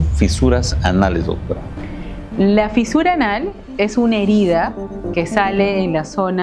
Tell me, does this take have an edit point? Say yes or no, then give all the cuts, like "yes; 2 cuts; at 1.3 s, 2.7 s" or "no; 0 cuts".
no; 0 cuts